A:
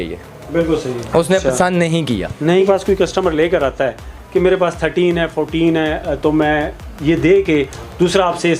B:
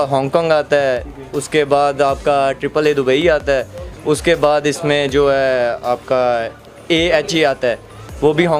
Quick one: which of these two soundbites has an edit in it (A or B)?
A